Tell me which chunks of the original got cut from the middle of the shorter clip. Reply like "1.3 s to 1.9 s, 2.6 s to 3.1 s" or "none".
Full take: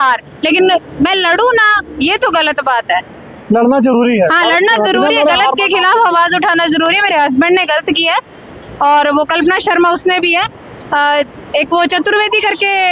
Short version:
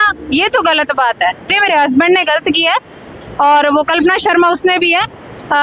3.3 s to 7.0 s